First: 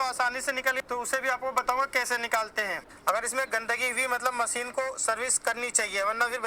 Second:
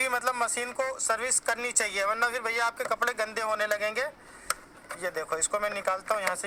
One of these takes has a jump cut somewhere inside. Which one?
first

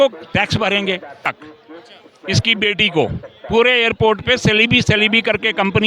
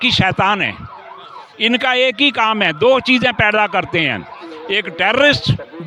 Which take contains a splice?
first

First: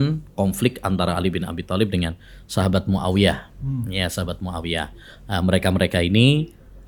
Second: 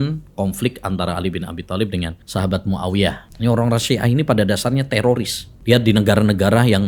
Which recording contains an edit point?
second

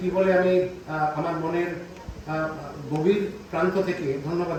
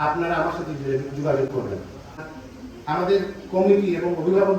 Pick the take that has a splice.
second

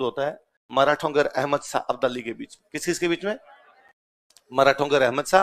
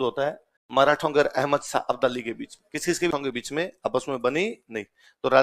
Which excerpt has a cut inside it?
second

